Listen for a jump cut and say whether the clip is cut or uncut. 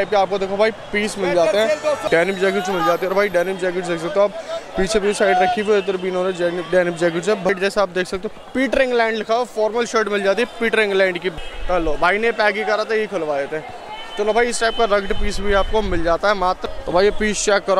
cut